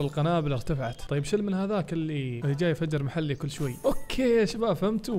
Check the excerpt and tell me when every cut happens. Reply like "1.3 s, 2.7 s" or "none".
1.0 s, 2.3 s, 3.7 s